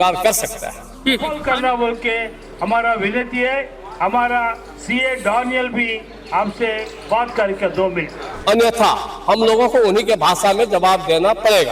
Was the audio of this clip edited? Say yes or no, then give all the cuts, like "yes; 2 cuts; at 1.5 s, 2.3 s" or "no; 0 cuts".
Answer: yes; 2 cuts; at 1.3 s, 8.2 s